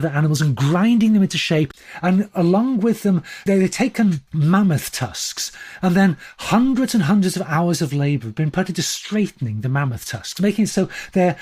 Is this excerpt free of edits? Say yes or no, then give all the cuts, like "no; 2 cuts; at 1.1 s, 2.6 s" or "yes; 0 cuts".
no; 3 cuts; at 1.8 s, 3.4 s, 4.3 s